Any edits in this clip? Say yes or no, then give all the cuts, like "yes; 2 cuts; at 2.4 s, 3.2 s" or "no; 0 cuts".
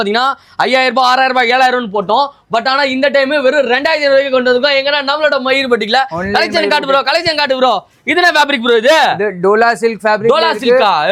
no; 0 cuts